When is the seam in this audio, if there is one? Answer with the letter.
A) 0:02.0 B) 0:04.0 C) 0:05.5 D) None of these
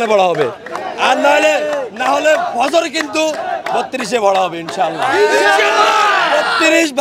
D